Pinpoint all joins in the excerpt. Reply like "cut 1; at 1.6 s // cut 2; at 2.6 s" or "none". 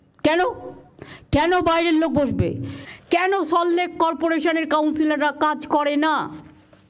none

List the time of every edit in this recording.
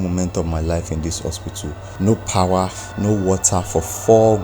cut 1; at 1.8 s // cut 2; at 2.8 s

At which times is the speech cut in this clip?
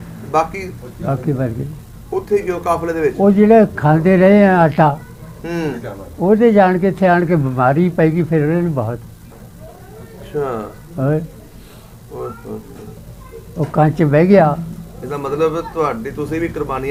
none

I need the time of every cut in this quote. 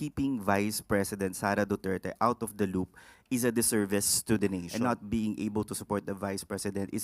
cut 1; at 4.7 s

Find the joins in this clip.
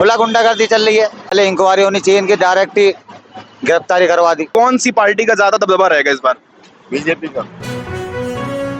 cut 1; at 1.3 s // cut 2; at 4.5 s // cut 3; at 7.6 s

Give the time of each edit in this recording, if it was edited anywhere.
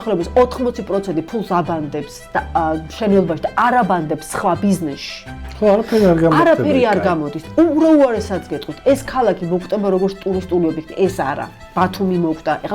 none

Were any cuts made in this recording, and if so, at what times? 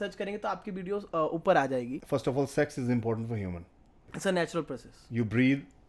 cut 1; at 2.0 s // cut 2; at 4.0 s

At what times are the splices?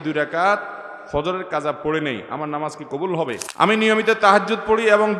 cut 1; at 3.5 s

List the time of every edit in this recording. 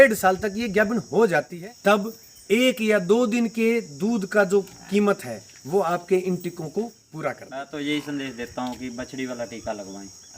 cut 1; at 1.5 s // cut 2; at 7.5 s

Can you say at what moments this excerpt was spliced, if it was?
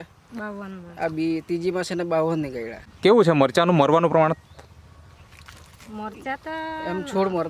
cut 1; at 2.8 s

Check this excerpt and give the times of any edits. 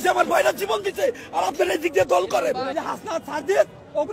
cut 1; at 2.7 s

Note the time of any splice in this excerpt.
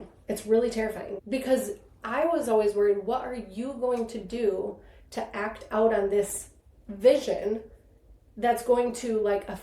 cut 1; at 1.1 s

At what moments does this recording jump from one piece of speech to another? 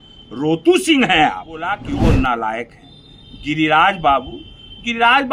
cut 1; at 1.8 s

